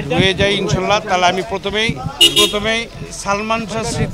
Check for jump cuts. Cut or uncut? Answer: uncut